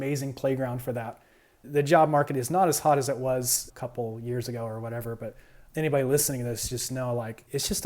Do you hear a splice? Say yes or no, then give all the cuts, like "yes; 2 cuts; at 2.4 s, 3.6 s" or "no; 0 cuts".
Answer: yes; 1 cut; at 1.7 s